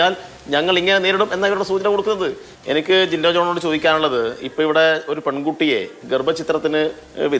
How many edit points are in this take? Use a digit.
1